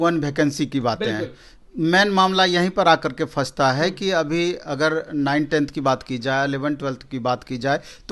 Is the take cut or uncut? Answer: uncut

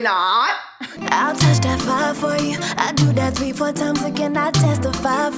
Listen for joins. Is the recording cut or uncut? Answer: cut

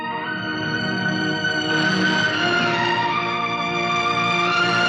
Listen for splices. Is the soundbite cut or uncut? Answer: uncut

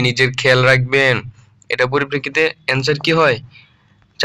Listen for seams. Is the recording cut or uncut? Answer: uncut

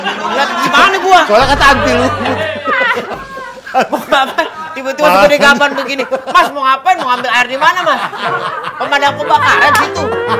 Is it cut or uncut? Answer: uncut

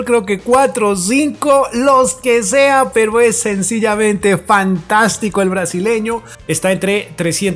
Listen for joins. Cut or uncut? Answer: cut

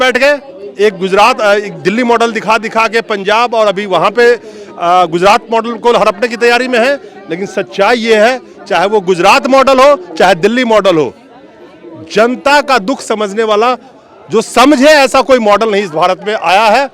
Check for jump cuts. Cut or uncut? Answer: uncut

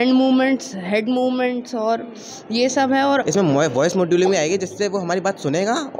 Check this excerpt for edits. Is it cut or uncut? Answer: cut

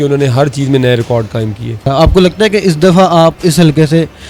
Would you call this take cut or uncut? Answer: cut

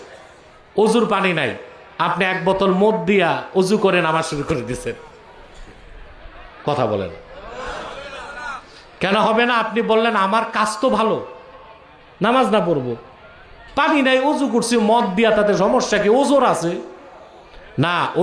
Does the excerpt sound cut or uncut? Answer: uncut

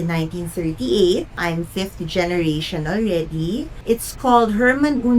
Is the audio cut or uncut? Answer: cut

